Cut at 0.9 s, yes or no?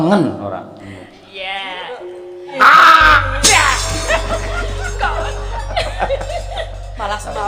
no